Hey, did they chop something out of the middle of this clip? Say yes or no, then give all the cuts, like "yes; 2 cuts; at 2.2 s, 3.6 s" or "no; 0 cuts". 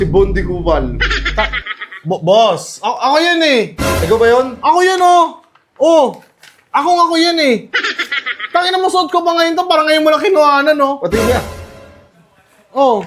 no; 0 cuts